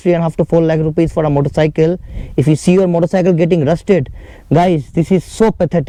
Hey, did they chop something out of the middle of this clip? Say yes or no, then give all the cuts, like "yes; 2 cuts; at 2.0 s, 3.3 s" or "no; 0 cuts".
no; 0 cuts